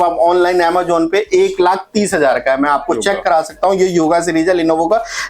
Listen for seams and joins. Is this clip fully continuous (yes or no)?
yes